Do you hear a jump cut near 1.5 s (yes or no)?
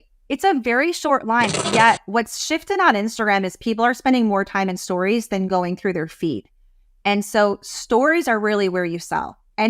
yes